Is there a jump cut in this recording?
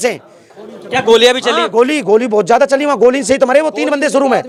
no; 0 cuts

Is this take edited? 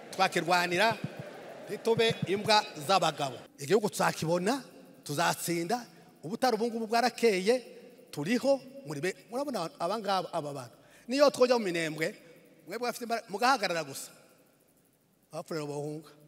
yes; 1 cut; at 3.5 s

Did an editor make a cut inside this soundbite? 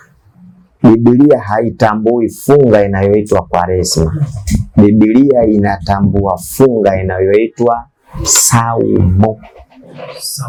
no; 0 cuts

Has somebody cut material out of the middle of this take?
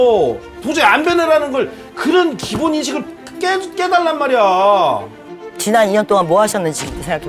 yes; 1 cut; at 5.2 s

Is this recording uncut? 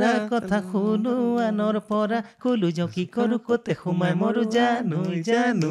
yes; 0 cuts

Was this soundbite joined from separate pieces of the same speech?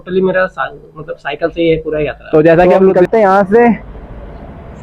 yes; 1 cut; at 2.7 s

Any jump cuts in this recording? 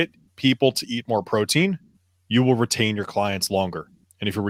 no; 0 cuts

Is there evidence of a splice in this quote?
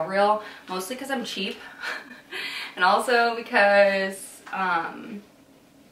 no; 0 cuts

